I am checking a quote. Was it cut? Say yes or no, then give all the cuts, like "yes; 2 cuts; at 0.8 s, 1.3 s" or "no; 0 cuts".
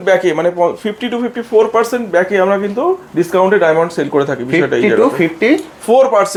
no; 0 cuts